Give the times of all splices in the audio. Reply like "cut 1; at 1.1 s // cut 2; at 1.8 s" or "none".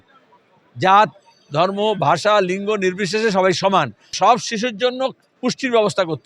cut 1; at 4.1 s